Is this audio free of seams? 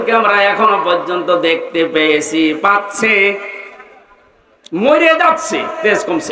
yes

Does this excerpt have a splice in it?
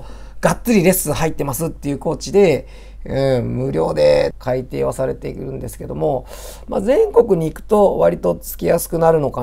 yes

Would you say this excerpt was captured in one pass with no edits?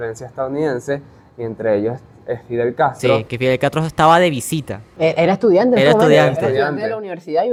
yes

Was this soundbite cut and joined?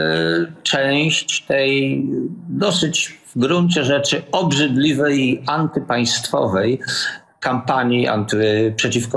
no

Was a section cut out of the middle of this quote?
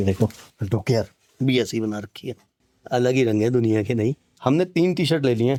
no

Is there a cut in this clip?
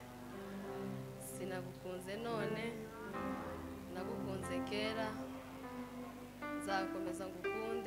no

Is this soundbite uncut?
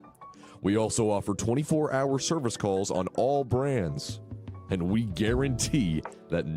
yes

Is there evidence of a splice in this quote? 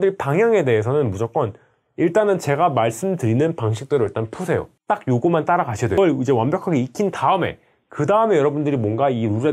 yes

